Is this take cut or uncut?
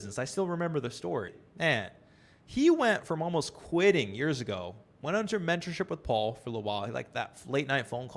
cut